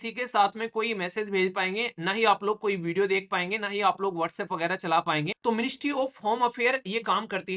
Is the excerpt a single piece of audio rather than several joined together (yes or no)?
no